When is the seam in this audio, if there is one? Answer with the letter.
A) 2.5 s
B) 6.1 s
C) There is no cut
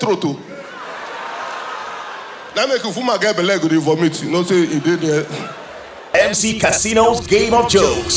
B